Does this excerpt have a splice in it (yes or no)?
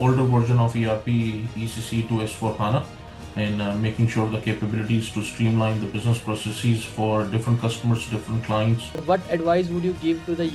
yes